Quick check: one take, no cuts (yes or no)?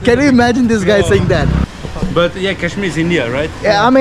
no